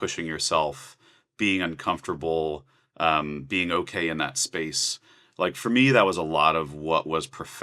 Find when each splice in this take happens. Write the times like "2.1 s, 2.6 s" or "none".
none

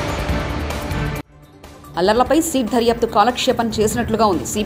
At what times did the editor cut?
1.3 s

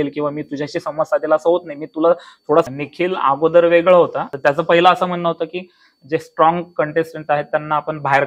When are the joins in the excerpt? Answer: 2.7 s, 4.3 s

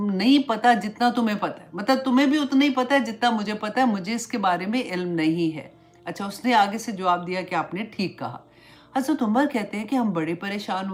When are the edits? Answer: none

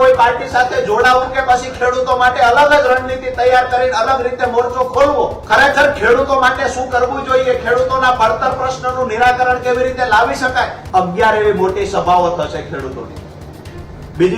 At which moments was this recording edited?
5.4 s, 10.8 s

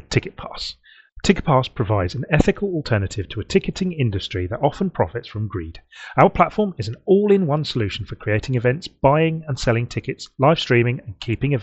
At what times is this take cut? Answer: none

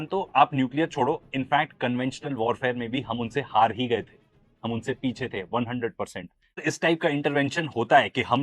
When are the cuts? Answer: 6.6 s

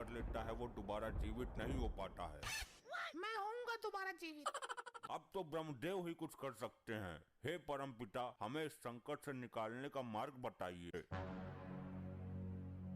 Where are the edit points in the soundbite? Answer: 5.0 s, 10.9 s

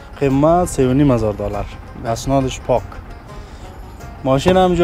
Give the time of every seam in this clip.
none

